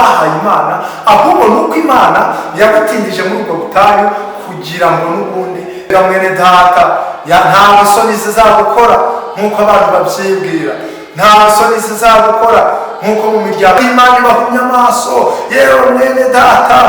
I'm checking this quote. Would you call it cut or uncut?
cut